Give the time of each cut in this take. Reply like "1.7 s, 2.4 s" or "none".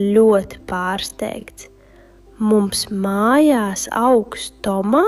none